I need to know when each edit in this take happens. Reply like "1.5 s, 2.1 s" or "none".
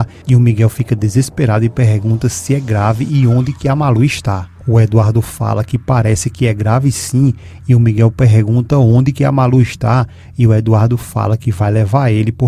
none